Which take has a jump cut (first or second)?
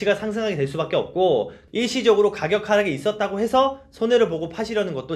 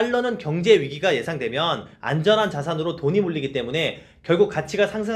first